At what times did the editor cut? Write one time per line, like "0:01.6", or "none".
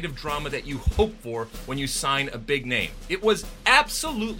0:03.0